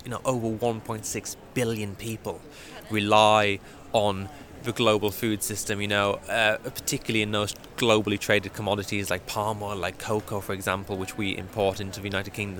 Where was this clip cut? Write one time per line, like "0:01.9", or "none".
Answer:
none